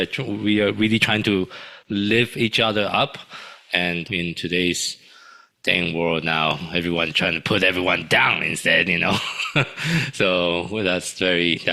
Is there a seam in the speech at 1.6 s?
no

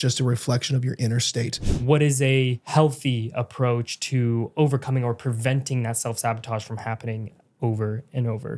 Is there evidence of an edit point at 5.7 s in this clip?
no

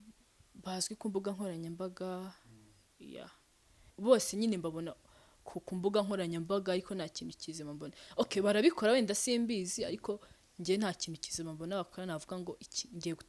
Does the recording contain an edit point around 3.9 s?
yes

